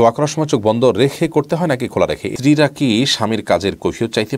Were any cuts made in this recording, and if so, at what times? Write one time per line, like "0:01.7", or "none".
0:02.3